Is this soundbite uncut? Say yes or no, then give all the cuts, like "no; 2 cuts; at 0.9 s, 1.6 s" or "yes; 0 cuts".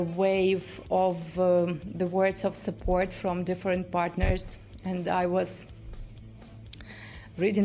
yes; 0 cuts